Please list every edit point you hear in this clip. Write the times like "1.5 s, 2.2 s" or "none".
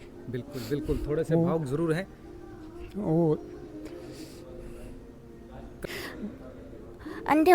5.8 s